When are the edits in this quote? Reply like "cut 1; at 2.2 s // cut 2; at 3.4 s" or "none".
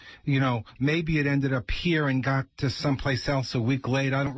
none